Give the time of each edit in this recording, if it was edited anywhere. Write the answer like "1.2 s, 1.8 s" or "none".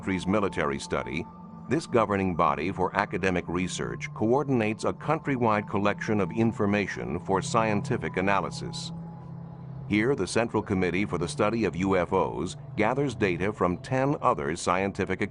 8.0 s